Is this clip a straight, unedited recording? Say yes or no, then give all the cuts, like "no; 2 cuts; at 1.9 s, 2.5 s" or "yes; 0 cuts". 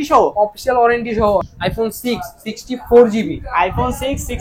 no; 1 cut; at 1.5 s